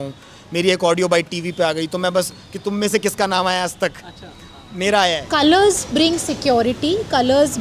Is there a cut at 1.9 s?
no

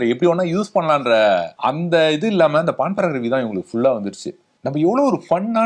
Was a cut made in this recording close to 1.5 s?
yes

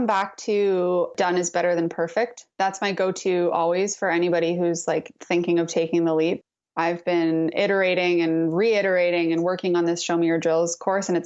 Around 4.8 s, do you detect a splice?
no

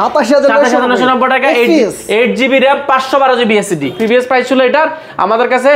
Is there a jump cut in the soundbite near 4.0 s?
yes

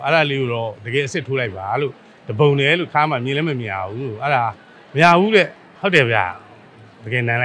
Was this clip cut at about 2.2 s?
no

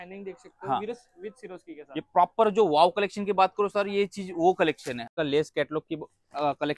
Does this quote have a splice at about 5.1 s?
yes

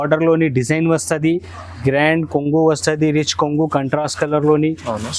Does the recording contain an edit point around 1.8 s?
yes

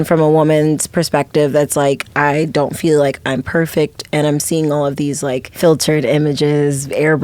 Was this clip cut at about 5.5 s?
yes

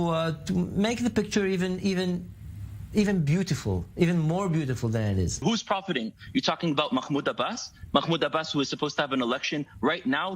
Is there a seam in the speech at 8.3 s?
no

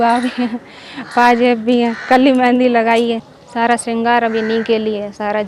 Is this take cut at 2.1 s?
no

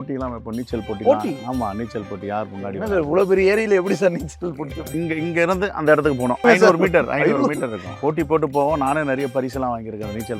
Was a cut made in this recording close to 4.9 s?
yes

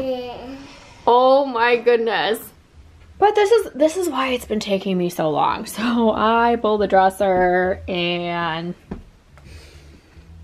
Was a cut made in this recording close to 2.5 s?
yes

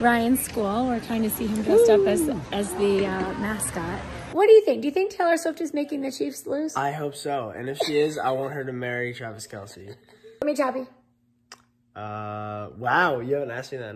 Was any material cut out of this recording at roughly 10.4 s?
yes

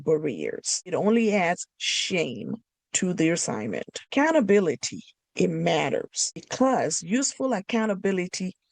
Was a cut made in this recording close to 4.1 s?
yes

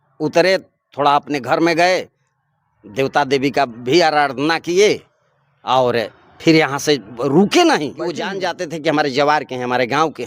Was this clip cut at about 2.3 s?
no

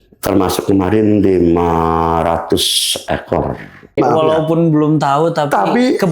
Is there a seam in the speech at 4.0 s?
yes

